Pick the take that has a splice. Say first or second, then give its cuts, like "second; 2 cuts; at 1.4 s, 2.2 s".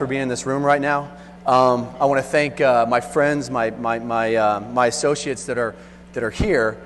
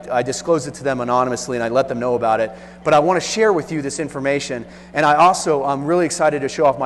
second; 1 cut; at 1.6 s